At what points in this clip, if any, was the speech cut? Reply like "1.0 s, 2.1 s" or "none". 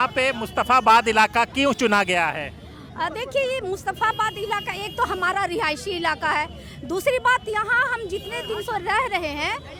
none